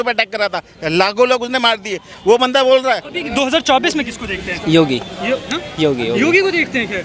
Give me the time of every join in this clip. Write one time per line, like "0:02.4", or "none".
0:03.2